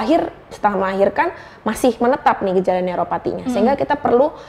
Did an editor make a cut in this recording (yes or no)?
no